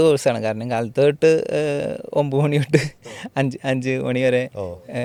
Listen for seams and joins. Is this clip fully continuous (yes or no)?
yes